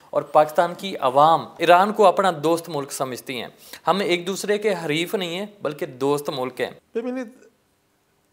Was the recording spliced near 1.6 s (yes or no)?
no